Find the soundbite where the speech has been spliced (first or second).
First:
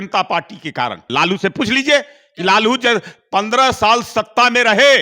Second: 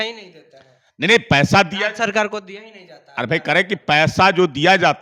first